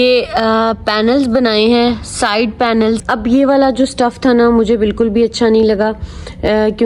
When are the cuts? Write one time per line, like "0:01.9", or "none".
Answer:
0:03.0